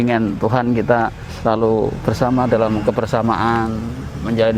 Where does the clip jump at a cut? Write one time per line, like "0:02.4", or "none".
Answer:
0:01.2